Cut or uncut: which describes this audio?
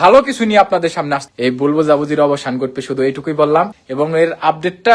cut